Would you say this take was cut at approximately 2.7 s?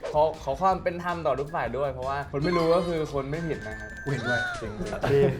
no; 1 cut; at 4.0 s

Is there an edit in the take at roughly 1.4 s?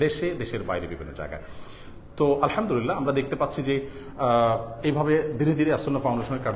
no; 0 cuts

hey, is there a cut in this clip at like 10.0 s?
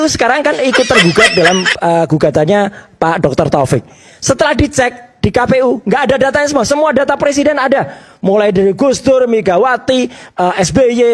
no; 0 cuts

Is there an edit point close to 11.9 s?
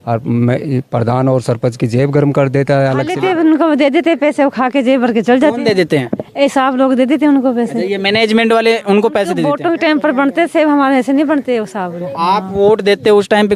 no; 2 cuts; at 3.1 s, 9.4 s

